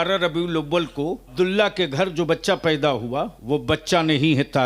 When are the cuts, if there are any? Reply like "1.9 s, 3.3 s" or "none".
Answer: 1.3 s, 3.4 s